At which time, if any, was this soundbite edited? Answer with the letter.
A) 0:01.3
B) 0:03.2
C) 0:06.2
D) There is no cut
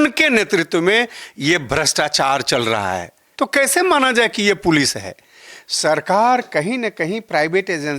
B